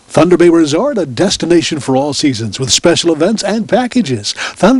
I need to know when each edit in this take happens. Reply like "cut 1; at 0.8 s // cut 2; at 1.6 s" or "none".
none